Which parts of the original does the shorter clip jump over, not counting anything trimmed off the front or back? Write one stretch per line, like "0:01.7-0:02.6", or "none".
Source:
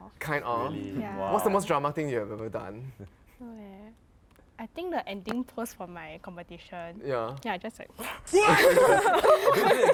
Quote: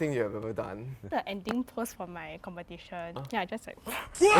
0:03.1-0:04.9
0:07.0-0:07.3